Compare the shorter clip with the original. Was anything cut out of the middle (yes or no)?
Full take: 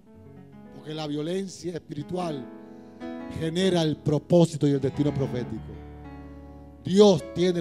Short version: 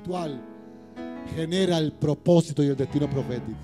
no